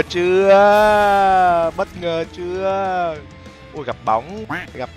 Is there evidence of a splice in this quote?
no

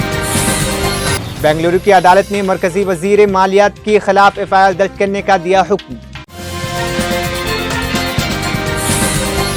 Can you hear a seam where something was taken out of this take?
yes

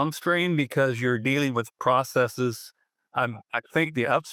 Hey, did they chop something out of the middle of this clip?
no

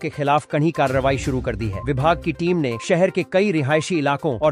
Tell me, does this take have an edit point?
no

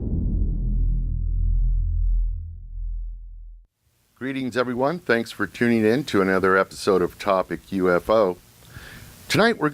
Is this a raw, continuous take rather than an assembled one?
yes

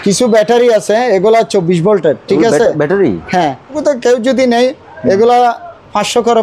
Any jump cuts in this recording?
yes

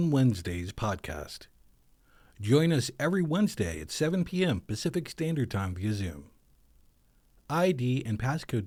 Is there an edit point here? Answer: no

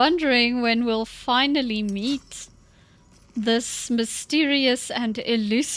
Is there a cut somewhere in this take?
no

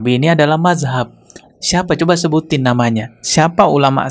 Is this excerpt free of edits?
yes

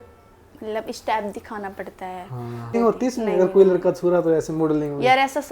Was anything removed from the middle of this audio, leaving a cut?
yes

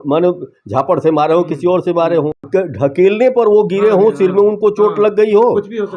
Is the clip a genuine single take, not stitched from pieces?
no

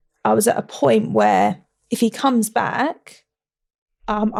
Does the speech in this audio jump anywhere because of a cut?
no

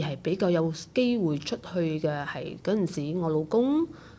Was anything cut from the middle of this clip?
no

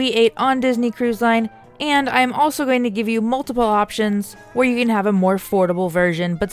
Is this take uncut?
yes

